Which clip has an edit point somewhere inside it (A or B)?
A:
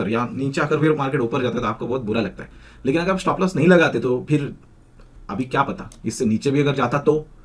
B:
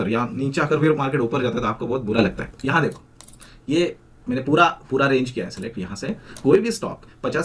B